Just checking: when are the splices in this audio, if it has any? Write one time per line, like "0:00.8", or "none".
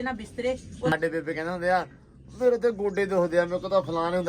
0:00.9